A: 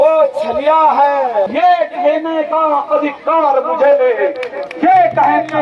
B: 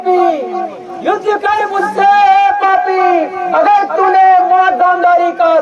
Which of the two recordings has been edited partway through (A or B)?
A